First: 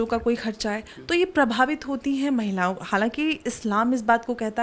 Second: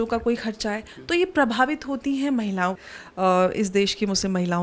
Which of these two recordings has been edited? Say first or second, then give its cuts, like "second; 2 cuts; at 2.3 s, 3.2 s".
second; 1 cut; at 2.8 s